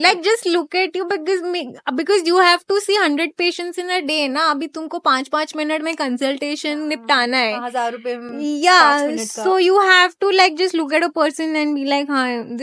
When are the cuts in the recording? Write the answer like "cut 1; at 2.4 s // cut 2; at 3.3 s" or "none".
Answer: none